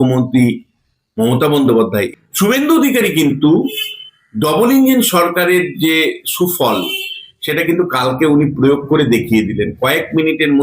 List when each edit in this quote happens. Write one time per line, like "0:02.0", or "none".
0:01.9